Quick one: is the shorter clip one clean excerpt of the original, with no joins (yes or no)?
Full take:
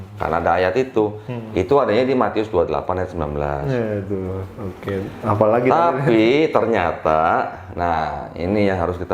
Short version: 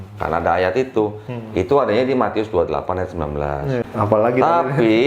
no